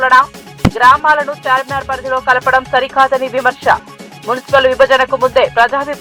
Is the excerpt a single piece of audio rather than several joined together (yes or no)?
yes